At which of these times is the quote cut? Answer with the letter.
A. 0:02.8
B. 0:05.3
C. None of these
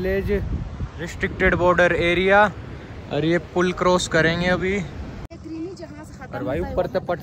B